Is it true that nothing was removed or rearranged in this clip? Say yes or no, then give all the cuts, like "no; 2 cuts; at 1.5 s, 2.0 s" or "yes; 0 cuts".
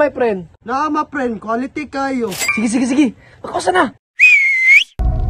no; 2 cuts; at 2.4 s, 4.0 s